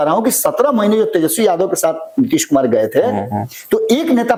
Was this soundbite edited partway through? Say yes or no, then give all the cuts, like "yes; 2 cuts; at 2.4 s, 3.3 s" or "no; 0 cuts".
no; 0 cuts